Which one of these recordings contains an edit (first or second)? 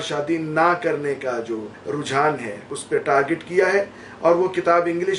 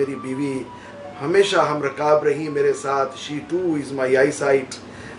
first